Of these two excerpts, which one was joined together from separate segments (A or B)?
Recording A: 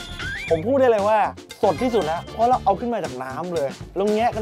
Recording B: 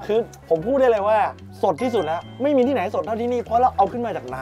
A